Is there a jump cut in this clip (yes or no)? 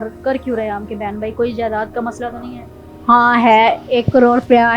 yes